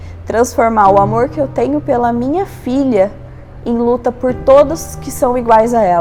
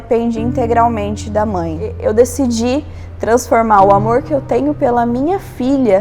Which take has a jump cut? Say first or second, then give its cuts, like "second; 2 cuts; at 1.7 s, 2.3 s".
second; 1 cut; at 2.0 s